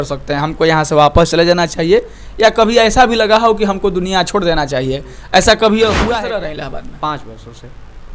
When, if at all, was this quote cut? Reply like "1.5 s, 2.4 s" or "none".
6.1 s